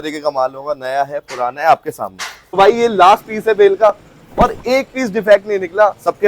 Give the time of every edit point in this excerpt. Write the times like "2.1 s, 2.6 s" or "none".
2.6 s